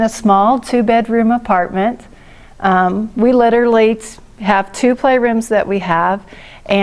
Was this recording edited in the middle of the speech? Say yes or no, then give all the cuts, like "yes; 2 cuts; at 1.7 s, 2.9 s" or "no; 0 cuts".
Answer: no; 0 cuts